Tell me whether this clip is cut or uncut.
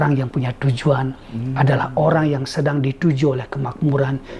uncut